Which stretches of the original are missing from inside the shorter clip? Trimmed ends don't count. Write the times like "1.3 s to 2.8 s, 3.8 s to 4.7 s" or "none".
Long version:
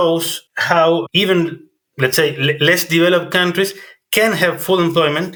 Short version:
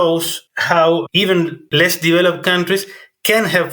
1.7 s to 2.6 s